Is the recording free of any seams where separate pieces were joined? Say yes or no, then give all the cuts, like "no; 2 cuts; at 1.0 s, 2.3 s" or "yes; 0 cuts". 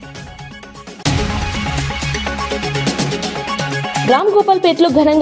no; 2 cuts; at 1.0 s, 4.0 s